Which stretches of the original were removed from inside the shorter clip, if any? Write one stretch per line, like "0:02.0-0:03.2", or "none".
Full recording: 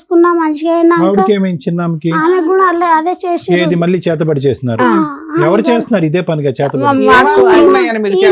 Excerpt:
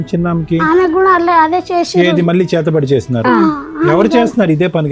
none